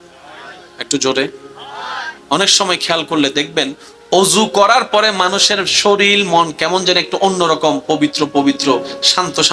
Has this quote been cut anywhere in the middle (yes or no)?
yes